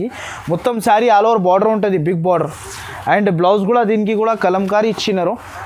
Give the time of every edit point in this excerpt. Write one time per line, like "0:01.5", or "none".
none